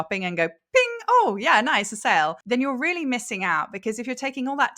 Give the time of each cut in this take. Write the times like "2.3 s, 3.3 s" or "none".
2.4 s